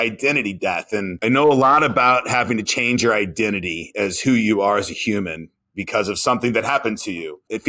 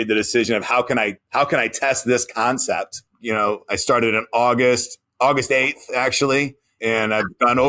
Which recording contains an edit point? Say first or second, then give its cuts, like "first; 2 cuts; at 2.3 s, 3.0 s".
second; 2 cuts; at 3.1 s, 6.6 s